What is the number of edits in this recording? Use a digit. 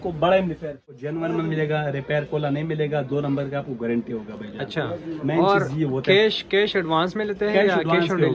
1